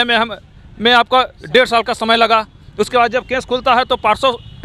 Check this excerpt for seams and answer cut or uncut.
uncut